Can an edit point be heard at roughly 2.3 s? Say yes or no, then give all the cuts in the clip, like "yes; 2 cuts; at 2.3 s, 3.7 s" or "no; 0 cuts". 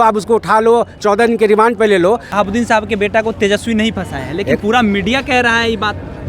yes; 1 cut; at 2.3 s